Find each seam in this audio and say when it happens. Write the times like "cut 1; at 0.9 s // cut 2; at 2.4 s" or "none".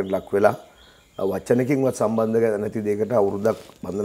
none